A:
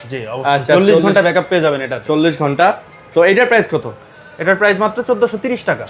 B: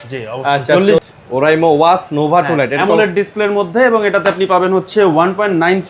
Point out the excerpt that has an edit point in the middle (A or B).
B